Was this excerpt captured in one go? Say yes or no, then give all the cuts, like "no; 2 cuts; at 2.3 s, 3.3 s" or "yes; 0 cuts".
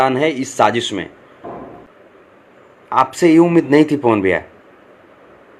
no; 1 cut; at 1.9 s